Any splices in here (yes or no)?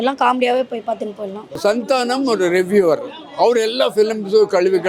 yes